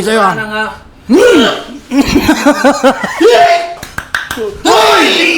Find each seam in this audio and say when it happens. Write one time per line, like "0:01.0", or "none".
0:03.8